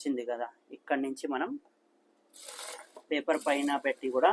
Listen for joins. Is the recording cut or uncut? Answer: uncut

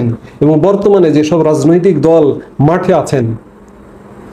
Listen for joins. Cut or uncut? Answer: uncut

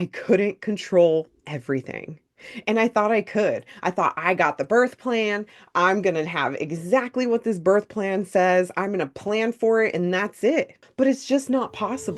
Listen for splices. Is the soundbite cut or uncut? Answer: cut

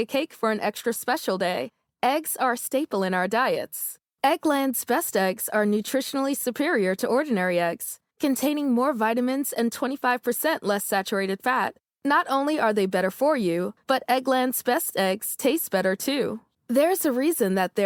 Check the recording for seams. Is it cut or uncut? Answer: uncut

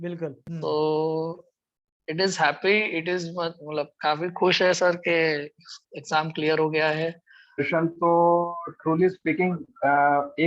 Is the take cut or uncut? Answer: cut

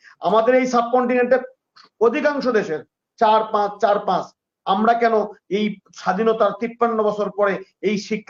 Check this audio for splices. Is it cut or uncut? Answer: uncut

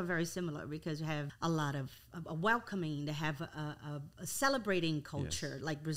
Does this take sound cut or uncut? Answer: cut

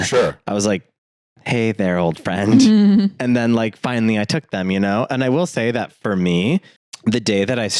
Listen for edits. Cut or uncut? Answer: cut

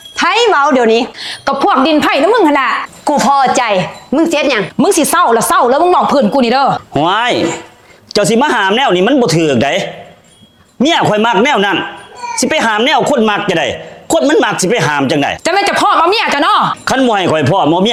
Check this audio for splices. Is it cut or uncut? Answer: uncut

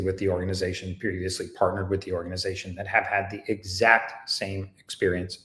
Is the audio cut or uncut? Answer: uncut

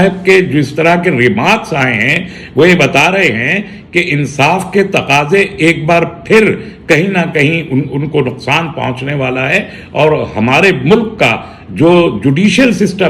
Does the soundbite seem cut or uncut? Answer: uncut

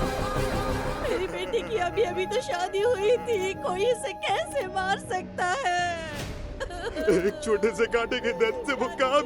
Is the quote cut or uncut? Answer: cut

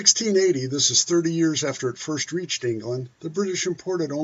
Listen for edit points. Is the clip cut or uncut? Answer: cut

